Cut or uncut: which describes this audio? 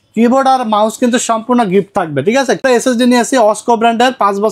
cut